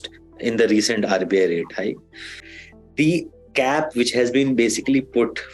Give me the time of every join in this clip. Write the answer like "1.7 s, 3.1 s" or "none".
2.4 s